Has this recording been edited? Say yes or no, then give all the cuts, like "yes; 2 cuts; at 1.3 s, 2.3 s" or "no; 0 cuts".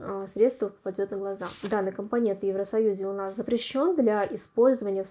yes; 1 cut; at 1.5 s